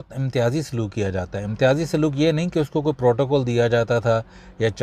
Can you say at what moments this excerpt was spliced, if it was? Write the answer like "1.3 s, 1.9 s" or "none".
none

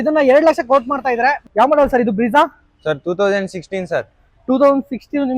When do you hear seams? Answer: 1.5 s

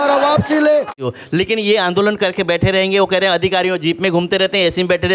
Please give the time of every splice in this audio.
1.0 s

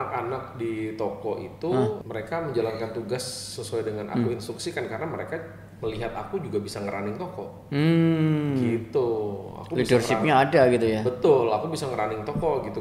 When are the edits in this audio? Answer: 2.0 s

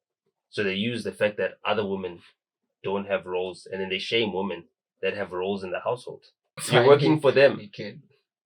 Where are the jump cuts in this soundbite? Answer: 6.6 s

